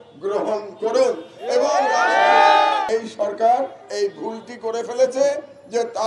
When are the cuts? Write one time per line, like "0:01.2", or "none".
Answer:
0:02.8